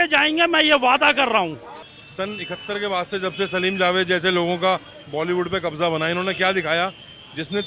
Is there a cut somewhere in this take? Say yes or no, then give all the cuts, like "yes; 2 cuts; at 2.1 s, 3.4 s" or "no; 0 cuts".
no; 0 cuts